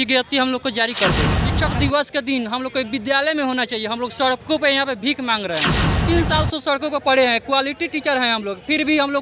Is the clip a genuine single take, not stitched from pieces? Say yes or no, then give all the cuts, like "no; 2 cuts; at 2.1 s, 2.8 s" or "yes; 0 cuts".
no; 2 cuts; at 1.4 s, 5.9 s